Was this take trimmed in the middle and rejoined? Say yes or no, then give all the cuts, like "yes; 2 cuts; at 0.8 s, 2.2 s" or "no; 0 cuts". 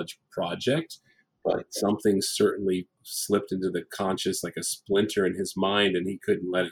no; 0 cuts